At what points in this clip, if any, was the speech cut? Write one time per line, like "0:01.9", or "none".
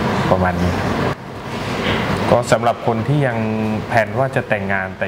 0:01.1